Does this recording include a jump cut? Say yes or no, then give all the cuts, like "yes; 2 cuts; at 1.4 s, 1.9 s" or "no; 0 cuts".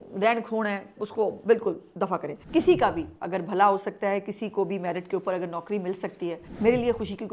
yes; 2 cuts; at 2.3 s, 6.4 s